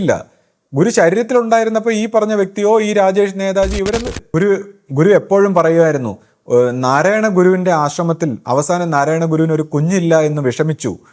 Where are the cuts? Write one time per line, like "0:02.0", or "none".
0:04.1